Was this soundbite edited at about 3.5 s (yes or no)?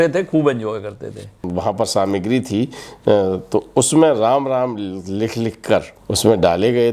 no